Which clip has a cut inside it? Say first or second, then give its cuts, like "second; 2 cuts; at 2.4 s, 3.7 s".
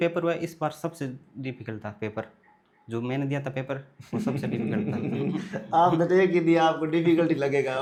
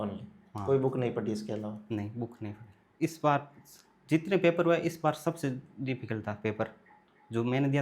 second; 1 cut; at 2.9 s